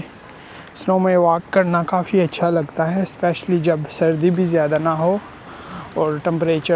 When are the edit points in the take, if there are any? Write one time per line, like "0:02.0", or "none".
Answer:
none